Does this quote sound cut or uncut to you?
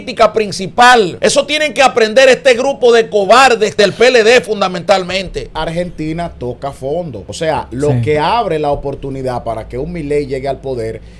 cut